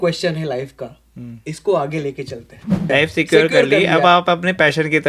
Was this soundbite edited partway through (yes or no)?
yes